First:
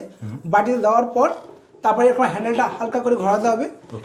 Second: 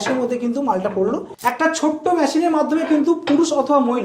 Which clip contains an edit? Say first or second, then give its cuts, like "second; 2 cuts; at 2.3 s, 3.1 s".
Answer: second; 1 cut; at 1.3 s